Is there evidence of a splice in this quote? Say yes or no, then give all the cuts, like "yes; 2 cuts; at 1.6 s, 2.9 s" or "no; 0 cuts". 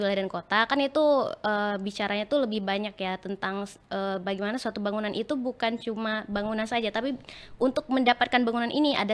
no; 0 cuts